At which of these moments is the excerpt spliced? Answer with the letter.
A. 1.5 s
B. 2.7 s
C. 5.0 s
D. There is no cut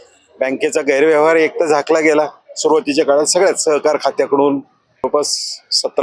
C